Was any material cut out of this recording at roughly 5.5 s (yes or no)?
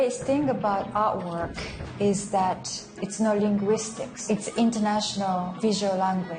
yes